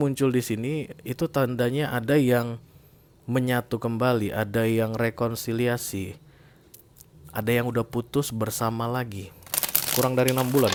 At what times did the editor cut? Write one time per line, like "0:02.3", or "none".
none